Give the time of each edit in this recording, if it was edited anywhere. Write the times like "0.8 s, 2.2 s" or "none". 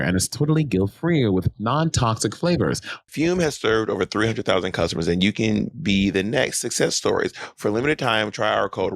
3.0 s